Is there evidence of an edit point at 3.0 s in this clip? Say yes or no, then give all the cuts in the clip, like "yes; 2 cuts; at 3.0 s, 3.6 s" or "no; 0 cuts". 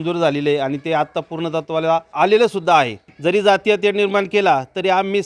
yes; 2 cuts; at 2.1 s, 3.0 s